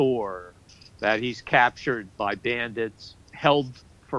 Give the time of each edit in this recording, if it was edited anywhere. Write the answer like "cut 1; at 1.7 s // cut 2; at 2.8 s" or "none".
cut 1; at 2.2 s // cut 2; at 3.3 s